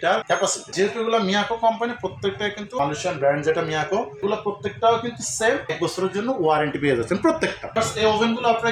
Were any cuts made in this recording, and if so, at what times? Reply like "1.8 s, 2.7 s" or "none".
none